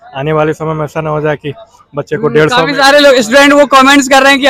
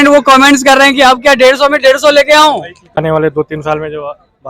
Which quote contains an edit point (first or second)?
second